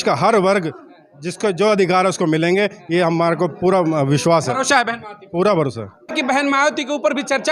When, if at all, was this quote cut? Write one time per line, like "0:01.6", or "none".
0:06.1